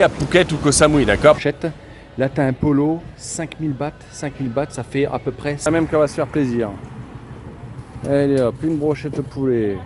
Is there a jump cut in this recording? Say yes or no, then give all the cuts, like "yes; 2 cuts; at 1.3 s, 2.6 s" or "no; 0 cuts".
yes; 2 cuts; at 1.4 s, 5.7 s